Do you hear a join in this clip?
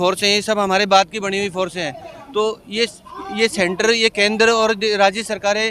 no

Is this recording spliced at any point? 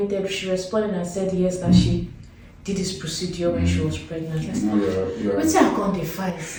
no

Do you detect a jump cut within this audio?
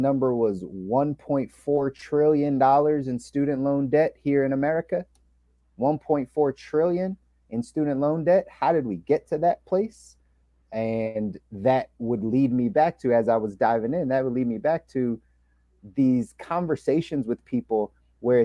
no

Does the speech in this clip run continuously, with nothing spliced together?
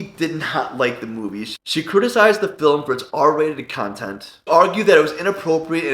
no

